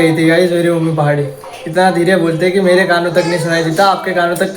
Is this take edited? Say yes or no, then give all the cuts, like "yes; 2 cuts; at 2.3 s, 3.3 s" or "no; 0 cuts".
no; 0 cuts